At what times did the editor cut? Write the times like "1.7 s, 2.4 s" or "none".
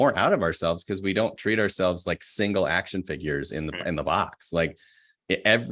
none

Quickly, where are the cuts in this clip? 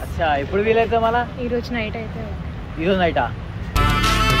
none

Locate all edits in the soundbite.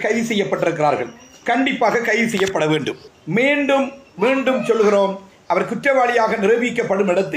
none

